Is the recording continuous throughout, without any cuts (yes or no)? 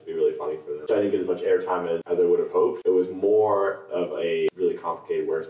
no